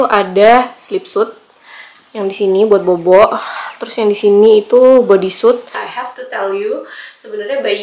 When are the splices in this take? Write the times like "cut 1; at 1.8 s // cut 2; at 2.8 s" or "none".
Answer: cut 1; at 5.6 s